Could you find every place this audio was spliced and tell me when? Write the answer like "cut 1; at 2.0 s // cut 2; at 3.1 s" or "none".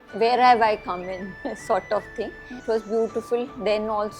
cut 1; at 2.5 s